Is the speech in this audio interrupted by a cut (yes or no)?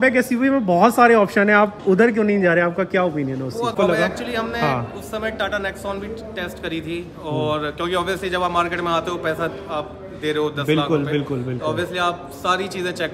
yes